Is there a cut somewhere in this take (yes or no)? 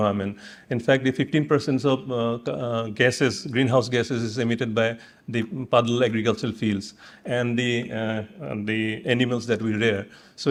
no